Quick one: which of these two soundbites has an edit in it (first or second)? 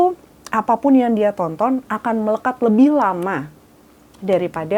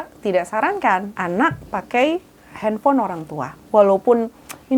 second